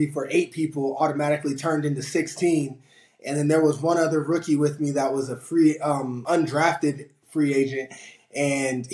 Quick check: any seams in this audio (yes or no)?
yes